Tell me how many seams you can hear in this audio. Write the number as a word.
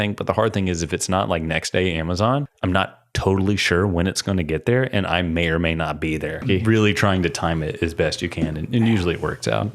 two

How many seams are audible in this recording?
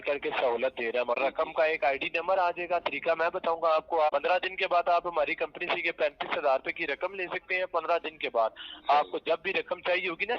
two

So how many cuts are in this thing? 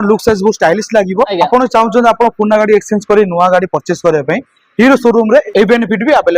two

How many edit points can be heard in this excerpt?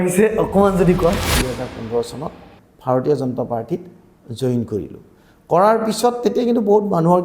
one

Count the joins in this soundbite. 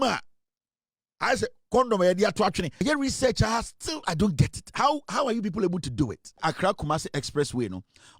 two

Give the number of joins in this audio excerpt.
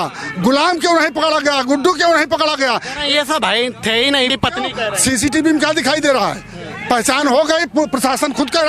one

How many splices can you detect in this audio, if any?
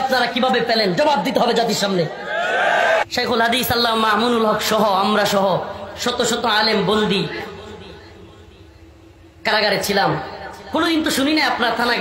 one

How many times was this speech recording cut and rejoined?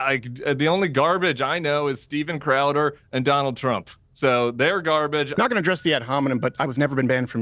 one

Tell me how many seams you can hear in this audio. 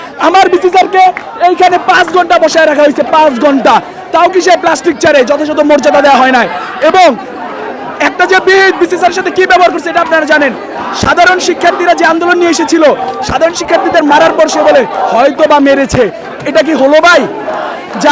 zero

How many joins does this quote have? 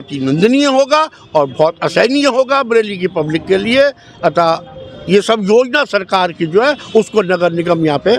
zero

